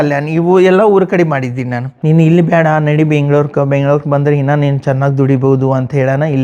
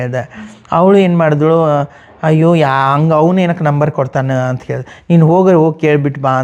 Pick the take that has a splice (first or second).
first